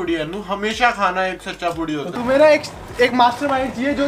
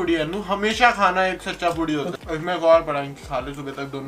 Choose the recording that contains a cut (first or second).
first